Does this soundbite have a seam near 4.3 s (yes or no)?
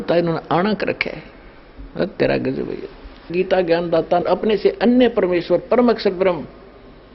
yes